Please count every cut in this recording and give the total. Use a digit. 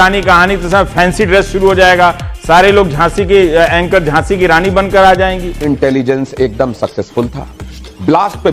1